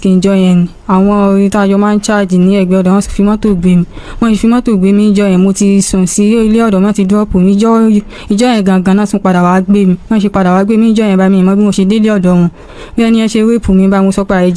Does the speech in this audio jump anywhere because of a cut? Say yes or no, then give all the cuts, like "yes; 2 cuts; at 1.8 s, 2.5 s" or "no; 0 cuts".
no; 0 cuts